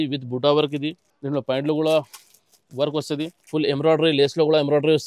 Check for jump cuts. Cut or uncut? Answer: cut